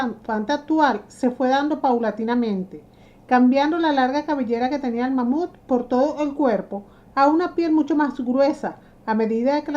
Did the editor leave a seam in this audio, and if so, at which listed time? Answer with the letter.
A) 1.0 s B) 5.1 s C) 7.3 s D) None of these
B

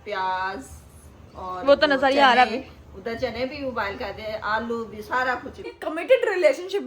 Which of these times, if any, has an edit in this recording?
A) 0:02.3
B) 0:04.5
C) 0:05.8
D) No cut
C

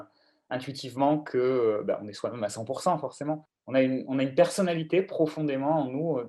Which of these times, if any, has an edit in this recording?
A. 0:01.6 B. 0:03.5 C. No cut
B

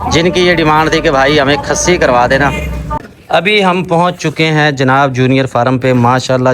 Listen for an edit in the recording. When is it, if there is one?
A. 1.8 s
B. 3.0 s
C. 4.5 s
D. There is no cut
B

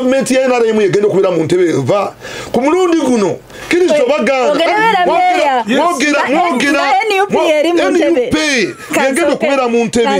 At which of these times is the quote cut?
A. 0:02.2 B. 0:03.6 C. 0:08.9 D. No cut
D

